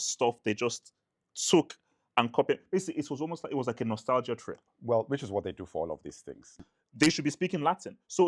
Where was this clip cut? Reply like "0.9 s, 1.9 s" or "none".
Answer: 6.6 s